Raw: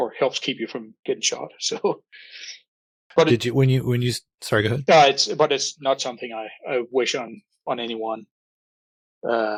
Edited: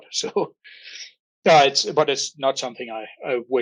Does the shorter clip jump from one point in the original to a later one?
yes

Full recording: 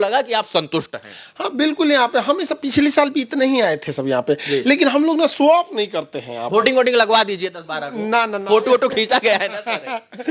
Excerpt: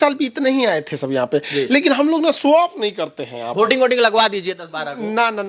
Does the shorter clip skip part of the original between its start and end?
no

